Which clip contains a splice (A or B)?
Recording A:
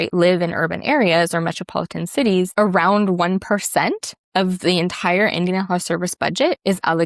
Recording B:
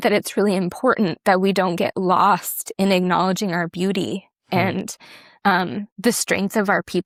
A